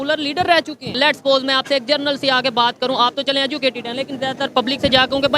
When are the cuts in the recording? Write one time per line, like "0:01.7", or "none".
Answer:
0:01.0

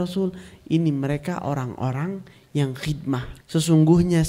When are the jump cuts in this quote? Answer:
0:03.3

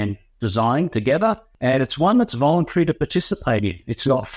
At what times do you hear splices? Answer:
0:01.5

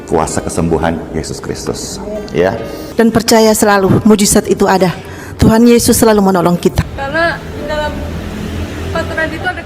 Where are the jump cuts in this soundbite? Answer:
0:02.7
0:06.8

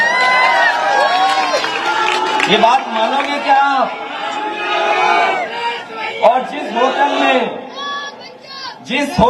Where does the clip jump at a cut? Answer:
none

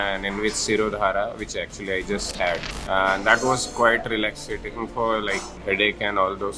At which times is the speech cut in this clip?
0:02.7
0:05.5

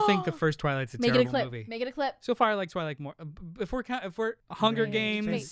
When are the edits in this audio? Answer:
0:04.5

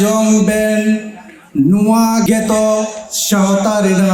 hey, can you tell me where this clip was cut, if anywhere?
0:02.2

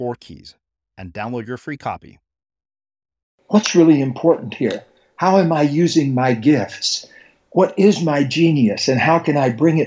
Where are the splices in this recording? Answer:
0:03.3

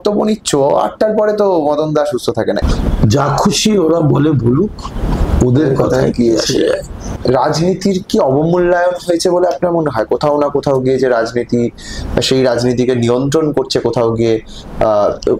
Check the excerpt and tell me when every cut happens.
0:02.6
0:07.1

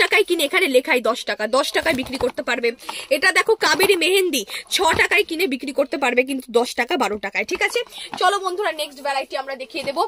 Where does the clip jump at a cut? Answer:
none

